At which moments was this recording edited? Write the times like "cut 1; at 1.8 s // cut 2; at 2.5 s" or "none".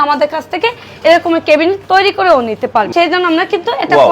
cut 1; at 2.9 s